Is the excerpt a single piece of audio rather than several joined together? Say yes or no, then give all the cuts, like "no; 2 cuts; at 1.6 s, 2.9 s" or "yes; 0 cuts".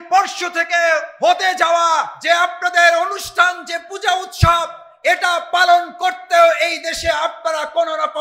no; 2 cuts; at 1.1 s, 2.1 s